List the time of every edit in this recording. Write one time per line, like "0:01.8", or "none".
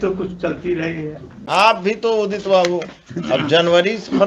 0:01.4